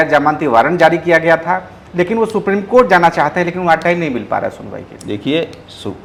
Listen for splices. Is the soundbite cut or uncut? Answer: uncut